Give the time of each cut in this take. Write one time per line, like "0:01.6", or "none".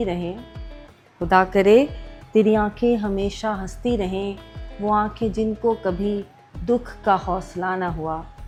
none